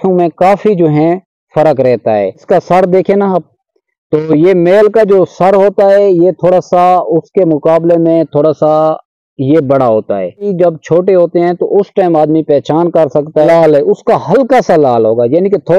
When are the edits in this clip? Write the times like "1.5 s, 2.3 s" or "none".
2.4 s, 10.5 s, 13.5 s